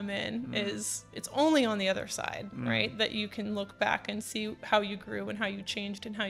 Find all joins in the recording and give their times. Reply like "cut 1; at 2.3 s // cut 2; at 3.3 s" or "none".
cut 1; at 1.1 s